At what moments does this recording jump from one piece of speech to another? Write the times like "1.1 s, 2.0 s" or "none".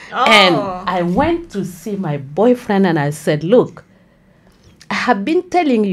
none